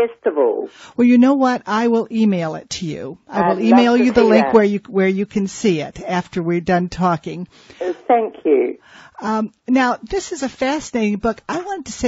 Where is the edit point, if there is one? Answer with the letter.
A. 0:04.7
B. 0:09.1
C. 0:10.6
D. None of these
D